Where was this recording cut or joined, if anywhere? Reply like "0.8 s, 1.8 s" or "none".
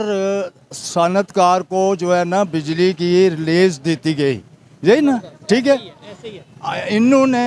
none